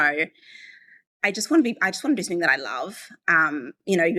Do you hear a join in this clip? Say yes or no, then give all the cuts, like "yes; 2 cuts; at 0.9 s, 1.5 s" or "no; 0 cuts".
no; 0 cuts